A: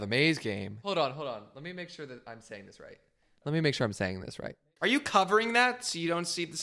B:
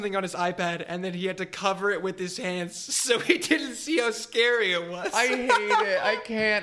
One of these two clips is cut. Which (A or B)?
A